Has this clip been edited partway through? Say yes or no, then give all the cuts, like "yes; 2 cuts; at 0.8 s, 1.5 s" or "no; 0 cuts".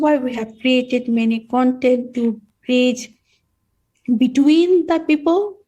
no; 0 cuts